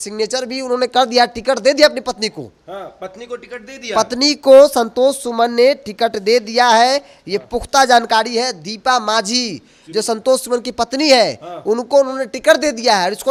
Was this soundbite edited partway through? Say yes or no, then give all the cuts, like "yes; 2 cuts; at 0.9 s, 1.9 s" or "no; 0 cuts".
no; 0 cuts